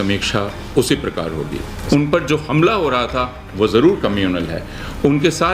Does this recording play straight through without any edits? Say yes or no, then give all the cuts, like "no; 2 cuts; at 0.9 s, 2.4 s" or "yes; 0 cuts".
no; 1 cut; at 1.7 s